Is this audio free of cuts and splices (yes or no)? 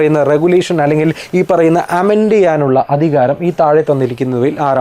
yes